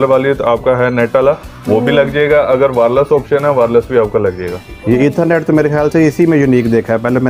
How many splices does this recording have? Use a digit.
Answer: 0